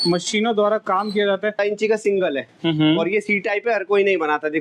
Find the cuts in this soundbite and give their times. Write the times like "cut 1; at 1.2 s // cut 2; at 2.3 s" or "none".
cut 1; at 1.6 s